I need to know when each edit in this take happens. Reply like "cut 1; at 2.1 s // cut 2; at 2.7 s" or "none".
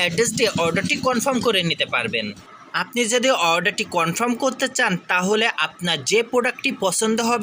none